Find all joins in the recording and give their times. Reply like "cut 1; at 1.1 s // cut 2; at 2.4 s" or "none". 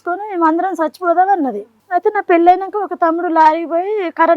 cut 1; at 1.7 s